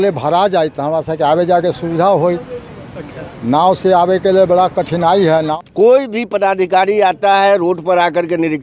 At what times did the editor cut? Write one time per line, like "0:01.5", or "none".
0:05.5